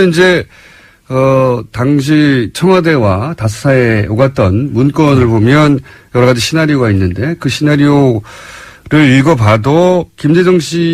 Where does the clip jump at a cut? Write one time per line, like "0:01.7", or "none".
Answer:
none